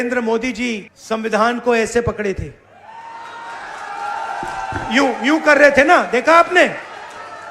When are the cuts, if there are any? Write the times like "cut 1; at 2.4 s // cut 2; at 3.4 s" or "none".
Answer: cut 1; at 0.9 s